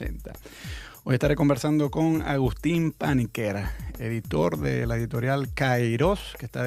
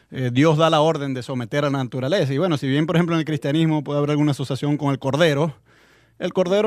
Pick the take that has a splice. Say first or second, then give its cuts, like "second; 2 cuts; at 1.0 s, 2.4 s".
first; 1 cut; at 3.4 s